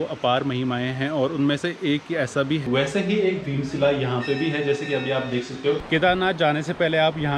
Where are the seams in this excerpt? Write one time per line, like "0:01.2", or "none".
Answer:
0:02.6
0:05.9

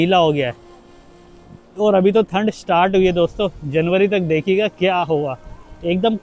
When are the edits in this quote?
none

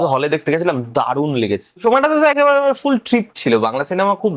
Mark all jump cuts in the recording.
0:01.8

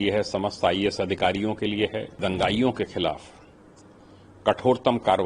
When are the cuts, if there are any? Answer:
0:02.2

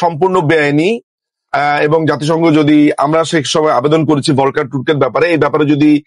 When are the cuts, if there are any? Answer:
none

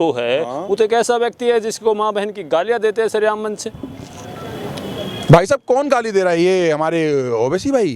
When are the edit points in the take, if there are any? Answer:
none

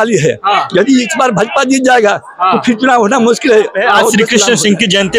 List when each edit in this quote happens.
0:04.3

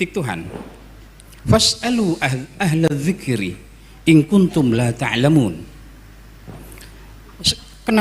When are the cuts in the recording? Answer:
none

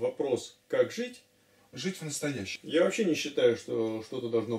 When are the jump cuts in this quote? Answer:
0:02.5

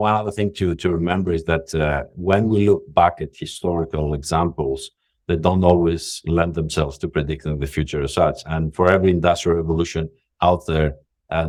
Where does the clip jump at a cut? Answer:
none

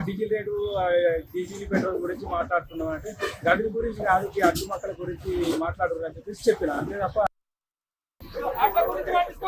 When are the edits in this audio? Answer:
0:07.8

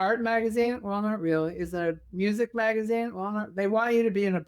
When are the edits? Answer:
none

